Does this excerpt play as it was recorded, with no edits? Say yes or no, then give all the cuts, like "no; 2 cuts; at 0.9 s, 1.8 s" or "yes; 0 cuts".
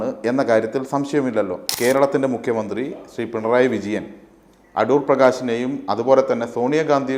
no; 1 cut; at 1.6 s